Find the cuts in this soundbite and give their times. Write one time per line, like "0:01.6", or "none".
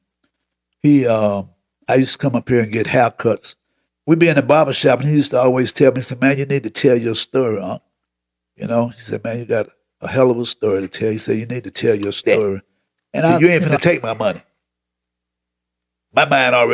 0:13.4